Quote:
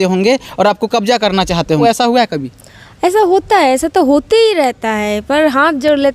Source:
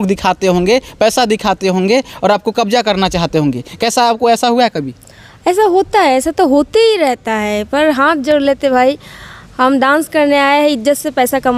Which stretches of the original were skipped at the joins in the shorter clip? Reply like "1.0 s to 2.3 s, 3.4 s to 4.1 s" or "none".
3.4 s to 4.2 s